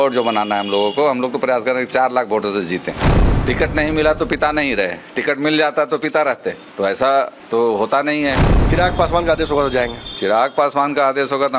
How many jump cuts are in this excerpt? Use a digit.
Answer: 4